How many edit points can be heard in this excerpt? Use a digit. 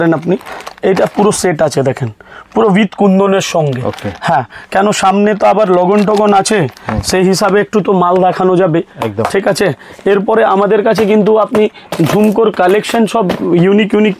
0